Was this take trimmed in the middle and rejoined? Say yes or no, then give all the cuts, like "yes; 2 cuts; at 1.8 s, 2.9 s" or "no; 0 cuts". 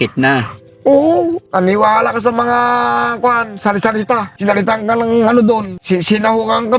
yes; 3 cuts; at 1.4 s, 4.3 s, 5.7 s